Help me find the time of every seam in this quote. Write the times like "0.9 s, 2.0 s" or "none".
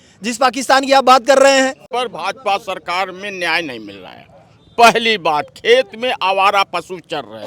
2.0 s

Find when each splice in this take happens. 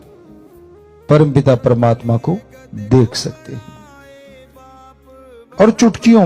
3.7 s, 5.6 s

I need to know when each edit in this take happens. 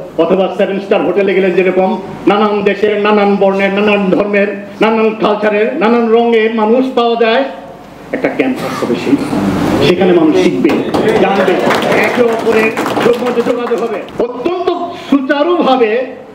14.0 s

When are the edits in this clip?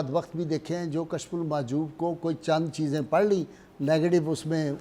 none

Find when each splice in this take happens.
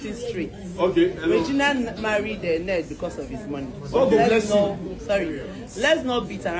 none

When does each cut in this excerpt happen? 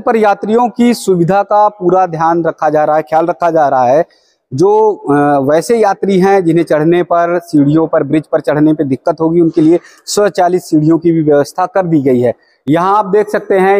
12.5 s

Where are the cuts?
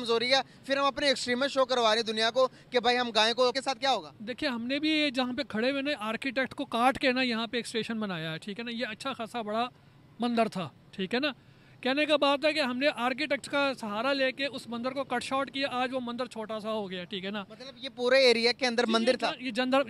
3.5 s

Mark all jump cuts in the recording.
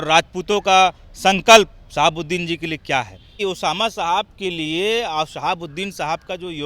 3.4 s

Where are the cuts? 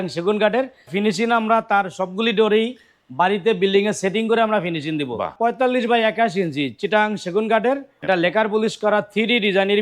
0.9 s, 5.3 s, 7.9 s

